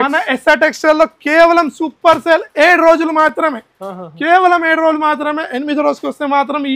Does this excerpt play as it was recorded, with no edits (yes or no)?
yes